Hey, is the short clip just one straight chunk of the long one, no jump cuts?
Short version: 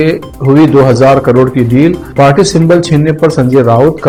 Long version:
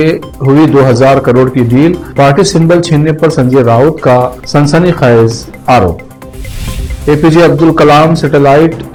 yes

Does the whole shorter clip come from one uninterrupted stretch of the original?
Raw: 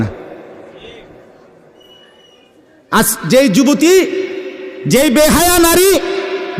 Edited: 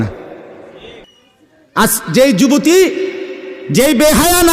no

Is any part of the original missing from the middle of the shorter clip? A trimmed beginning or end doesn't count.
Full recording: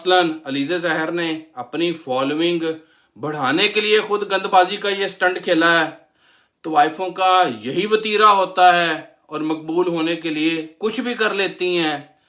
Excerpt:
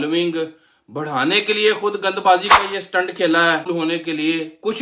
yes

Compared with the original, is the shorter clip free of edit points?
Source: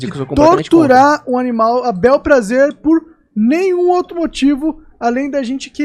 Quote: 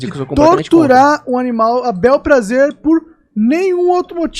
yes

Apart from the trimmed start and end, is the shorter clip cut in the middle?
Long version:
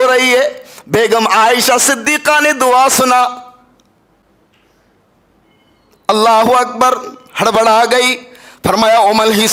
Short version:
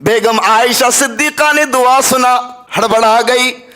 yes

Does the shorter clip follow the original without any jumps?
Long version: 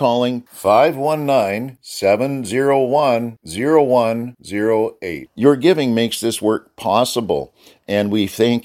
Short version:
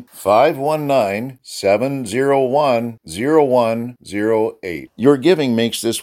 yes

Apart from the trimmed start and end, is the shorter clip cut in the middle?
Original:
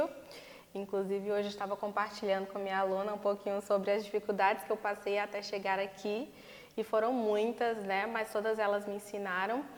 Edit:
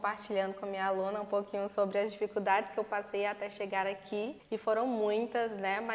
yes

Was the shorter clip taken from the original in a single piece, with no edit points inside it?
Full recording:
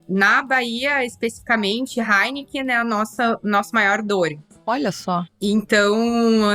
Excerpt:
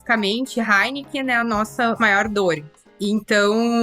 no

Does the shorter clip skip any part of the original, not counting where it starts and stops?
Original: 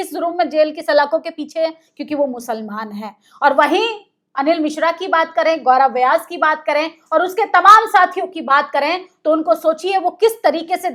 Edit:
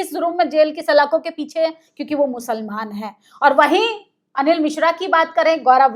no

